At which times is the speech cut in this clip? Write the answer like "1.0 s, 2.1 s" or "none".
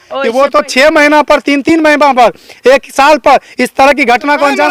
none